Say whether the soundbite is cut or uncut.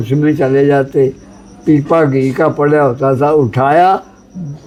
uncut